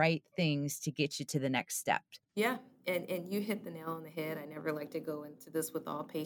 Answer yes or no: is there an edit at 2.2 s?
yes